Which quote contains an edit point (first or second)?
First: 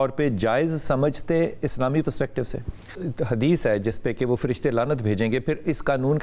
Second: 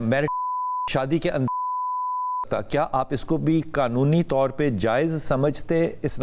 first